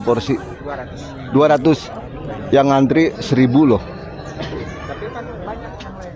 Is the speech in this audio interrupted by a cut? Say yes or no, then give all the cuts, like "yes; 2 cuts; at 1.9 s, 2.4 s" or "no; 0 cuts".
no; 0 cuts